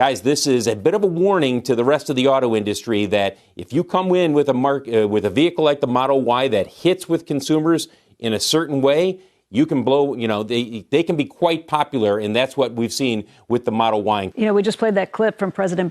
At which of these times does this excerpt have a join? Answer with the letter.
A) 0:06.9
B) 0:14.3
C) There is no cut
B